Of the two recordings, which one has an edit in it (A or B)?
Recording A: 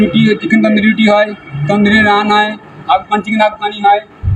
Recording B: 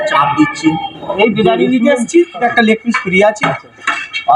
B